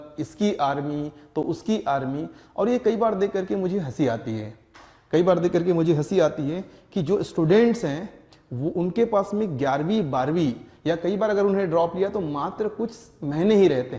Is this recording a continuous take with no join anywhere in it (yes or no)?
yes